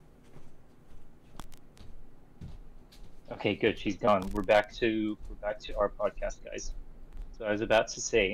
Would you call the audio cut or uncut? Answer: uncut